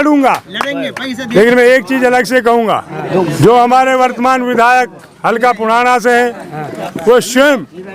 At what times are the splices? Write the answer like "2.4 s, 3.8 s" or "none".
1.2 s, 3.0 s